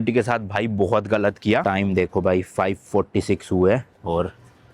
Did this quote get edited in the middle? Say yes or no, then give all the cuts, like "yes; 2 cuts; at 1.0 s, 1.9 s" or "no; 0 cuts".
yes; 1 cut; at 1.7 s